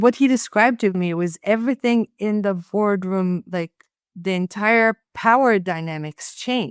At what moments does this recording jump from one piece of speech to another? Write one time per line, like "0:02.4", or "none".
none